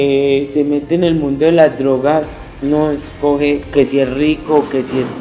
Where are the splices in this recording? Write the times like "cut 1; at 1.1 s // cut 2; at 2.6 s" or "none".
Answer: cut 1; at 3.7 s